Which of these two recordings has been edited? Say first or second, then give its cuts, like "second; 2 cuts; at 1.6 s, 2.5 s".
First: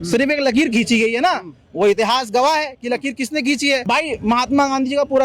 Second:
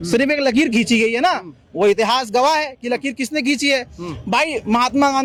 first; 1 cut; at 3.8 s